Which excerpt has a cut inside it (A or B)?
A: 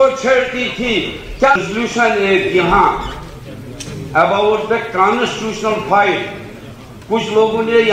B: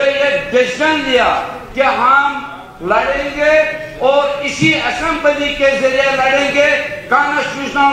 A